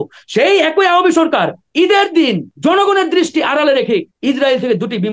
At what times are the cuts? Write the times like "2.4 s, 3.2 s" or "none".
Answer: 2.5 s, 4.1 s